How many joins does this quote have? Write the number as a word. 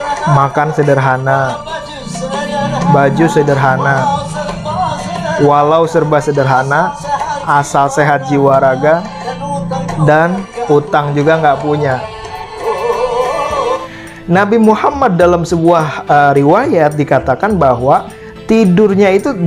one